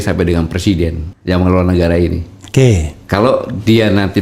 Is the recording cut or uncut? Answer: cut